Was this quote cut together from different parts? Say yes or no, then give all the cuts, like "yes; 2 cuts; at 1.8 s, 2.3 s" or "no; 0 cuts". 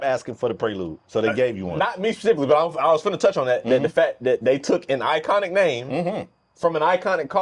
no; 0 cuts